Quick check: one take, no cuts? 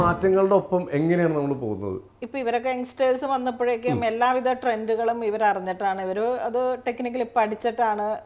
yes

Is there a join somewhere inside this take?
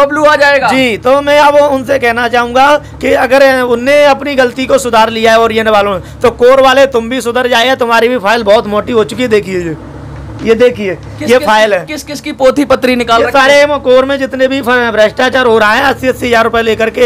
no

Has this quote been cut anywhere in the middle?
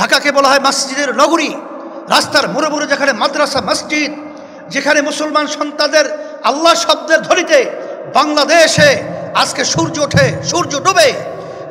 no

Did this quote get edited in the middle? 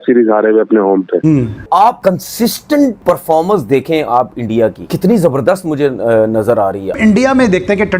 yes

